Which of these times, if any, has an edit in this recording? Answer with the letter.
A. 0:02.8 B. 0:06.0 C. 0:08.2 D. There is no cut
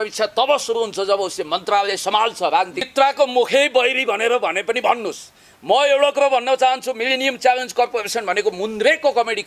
A